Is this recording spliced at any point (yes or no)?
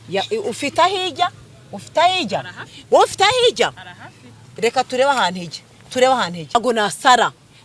yes